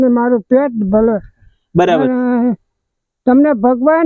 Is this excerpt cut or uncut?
uncut